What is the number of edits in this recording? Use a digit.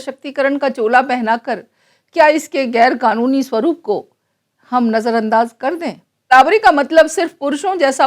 1